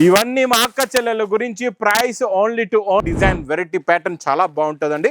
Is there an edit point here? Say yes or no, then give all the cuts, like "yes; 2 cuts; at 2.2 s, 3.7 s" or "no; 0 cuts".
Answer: yes; 1 cut; at 3.0 s